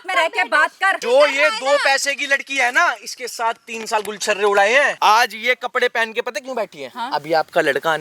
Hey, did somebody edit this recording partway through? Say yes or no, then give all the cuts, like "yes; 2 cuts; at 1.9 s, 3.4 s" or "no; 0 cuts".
yes; 2 cuts; at 1.0 s, 4.9 s